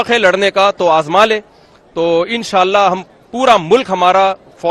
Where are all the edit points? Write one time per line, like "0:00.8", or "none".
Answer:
none